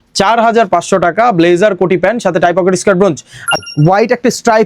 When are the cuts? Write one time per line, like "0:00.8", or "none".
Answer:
0:03.6